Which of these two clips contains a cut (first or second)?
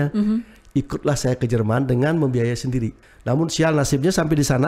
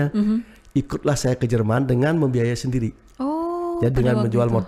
first